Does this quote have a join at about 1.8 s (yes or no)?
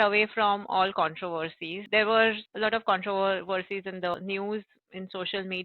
yes